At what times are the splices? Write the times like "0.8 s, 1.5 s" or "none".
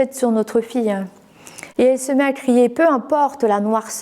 1.6 s